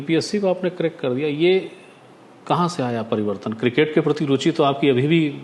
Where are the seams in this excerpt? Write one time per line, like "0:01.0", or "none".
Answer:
none